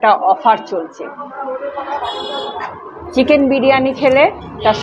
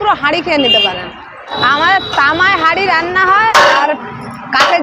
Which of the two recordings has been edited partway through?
second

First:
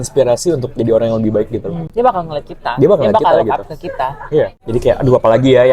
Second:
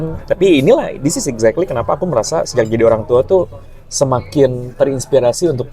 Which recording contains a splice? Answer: first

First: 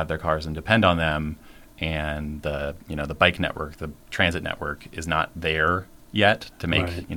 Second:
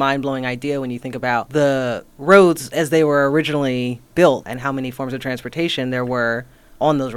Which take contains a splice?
second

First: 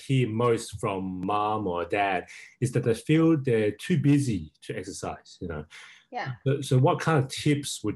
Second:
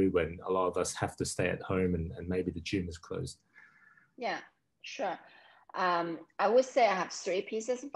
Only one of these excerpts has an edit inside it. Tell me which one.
first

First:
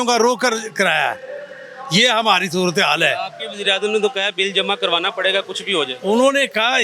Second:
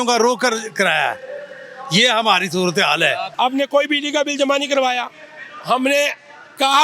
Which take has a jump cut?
second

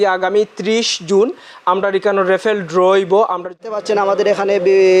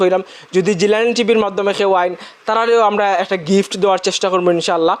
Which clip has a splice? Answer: first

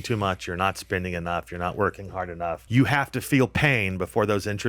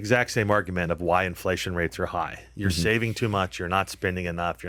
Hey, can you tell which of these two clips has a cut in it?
first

